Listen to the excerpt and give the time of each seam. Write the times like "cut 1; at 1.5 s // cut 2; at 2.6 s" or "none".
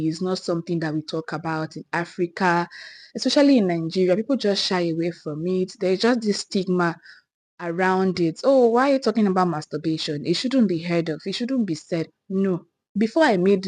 none